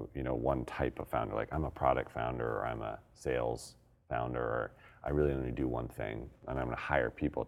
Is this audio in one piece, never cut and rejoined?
no; 1 cut; at 6.4 s

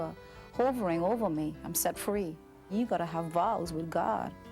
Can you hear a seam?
yes; 1 cut; at 2.7 s

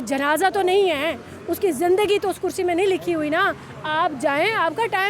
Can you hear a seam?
no; 0 cuts

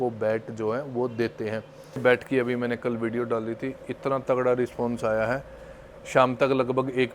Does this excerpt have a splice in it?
yes; 1 cut; at 2.0 s

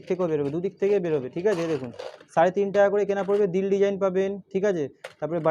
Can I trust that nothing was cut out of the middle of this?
yes; 0 cuts

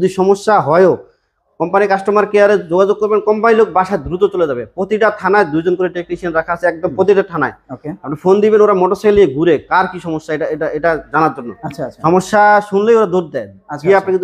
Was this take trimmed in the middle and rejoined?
no; 0 cuts

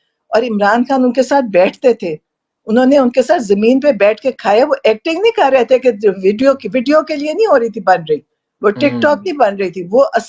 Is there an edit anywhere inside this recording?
no; 0 cuts

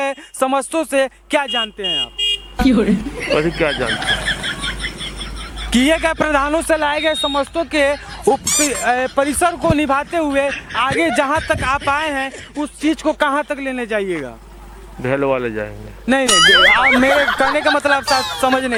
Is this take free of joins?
yes; 0 cuts

